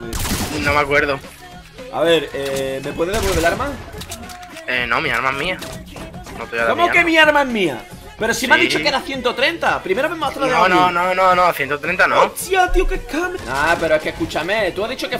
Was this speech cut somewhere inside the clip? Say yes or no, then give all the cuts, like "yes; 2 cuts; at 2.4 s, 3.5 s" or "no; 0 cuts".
yes; 1 cut; at 13.3 s